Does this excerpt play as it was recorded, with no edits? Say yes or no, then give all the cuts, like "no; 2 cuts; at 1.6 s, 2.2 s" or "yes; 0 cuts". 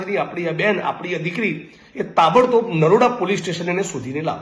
yes; 0 cuts